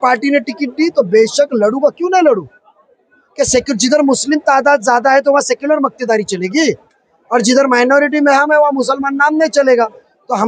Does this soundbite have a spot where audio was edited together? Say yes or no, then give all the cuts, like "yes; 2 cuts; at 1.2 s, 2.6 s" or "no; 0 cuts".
no; 0 cuts